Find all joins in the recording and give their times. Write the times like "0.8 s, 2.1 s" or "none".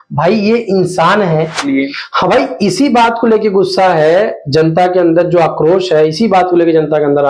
1.6 s